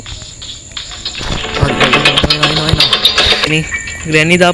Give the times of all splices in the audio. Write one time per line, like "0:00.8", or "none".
0:03.5